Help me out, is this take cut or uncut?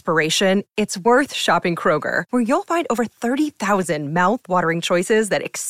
uncut